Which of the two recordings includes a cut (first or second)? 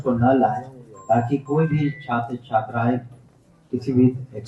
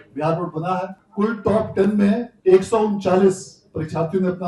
second